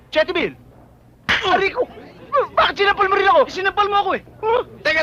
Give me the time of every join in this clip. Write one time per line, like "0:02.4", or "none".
none